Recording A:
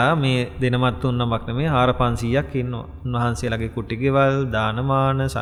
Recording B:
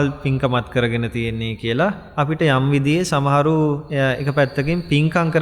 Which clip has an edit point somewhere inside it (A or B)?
B